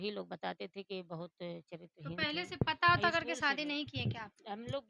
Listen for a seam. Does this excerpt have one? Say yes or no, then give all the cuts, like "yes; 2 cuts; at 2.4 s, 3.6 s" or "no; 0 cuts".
no; 0 cuts